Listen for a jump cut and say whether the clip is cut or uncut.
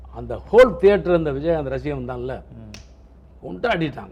uncut